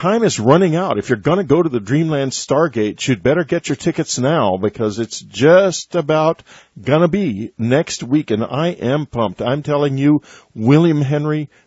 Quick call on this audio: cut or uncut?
uncut